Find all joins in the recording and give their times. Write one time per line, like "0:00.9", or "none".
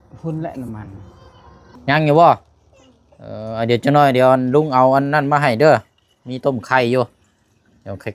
0:01.7